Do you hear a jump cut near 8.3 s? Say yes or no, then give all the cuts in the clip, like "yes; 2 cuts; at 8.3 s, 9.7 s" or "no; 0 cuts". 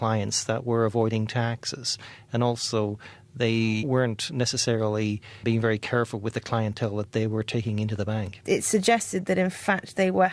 no; 0 cuts